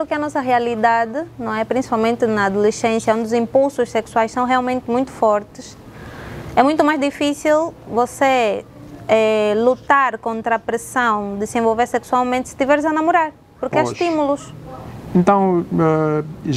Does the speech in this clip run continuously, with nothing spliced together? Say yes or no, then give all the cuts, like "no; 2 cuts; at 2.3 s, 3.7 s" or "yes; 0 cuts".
yes; 0 cuts